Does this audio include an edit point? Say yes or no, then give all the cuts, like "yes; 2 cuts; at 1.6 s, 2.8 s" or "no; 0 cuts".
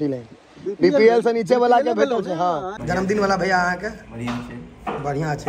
yes; 1 cut; at 2.8 s